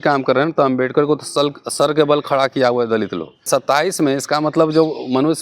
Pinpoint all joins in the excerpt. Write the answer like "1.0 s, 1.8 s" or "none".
3.5 s